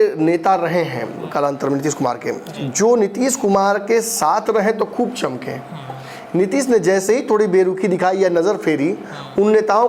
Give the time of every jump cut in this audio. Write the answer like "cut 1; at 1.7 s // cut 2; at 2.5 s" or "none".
none